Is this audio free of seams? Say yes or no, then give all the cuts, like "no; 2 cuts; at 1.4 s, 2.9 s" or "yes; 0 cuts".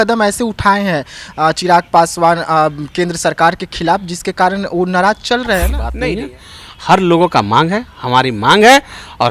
no; 1 cut; at 5.8 s